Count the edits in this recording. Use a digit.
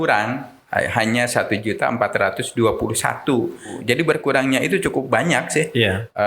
1